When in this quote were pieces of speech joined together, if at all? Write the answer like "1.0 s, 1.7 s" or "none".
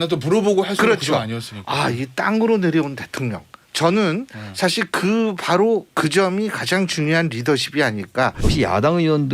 8.4 s

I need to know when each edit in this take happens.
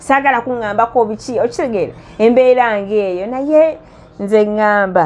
none

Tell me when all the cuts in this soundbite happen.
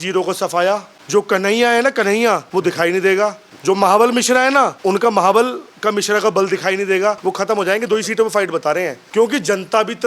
0.9 s, 2.5 s, 3.5 s, 4.8 s, 7.2 s, 9.0 s

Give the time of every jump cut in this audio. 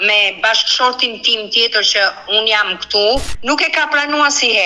3.3 s

